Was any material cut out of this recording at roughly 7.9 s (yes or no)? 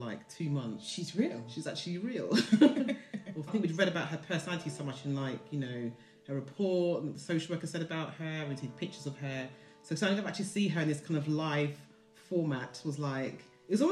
no